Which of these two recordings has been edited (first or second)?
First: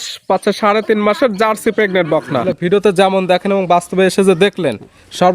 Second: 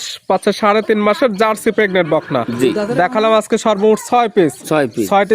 first